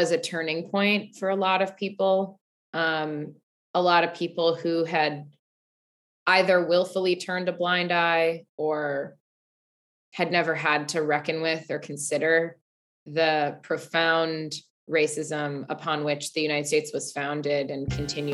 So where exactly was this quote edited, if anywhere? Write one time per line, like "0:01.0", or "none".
none